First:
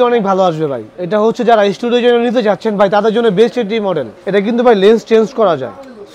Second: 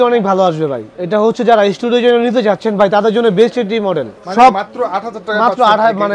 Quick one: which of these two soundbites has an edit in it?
first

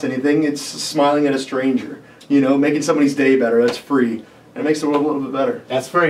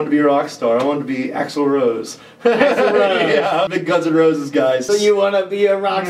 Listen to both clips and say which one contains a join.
second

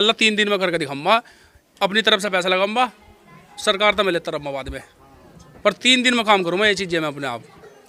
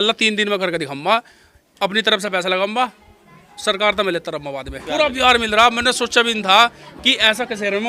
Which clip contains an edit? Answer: second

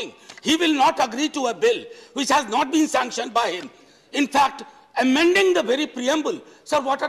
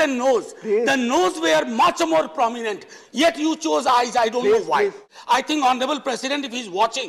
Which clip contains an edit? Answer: second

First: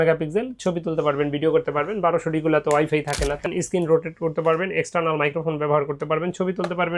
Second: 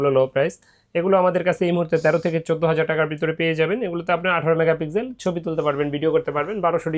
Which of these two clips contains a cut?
first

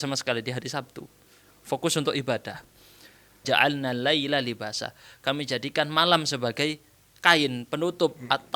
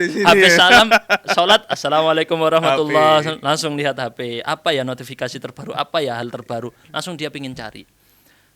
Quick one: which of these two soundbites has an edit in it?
first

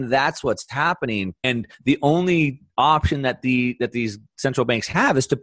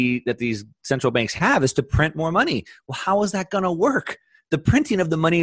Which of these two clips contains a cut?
first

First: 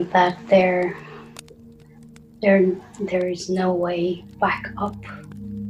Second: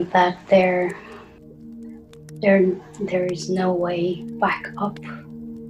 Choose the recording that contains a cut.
second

